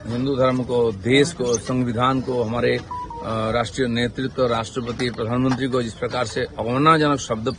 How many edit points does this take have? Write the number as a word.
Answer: zero